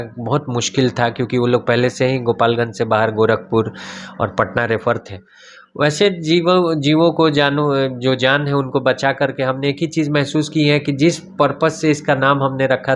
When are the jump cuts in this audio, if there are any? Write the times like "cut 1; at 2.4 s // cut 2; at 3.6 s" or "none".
none